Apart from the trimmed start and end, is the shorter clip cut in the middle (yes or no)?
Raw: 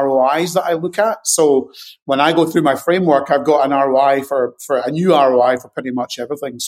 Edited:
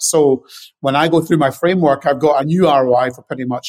yes